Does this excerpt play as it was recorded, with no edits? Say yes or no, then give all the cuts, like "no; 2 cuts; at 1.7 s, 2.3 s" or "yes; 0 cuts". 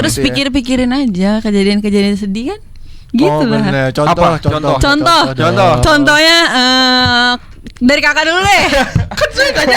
yes; 0 cuts